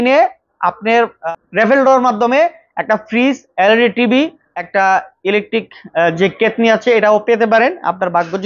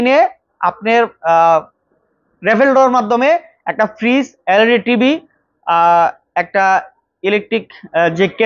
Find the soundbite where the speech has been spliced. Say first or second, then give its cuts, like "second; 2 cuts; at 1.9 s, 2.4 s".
first; 2 cuts; at 1.2 s, 4.8 s